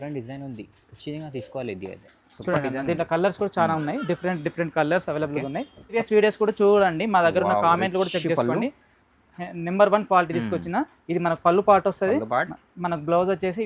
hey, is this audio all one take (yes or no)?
no